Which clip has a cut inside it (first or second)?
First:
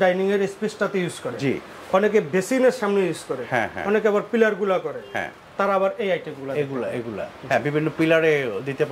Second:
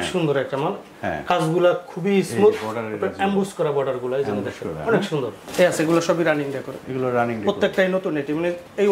second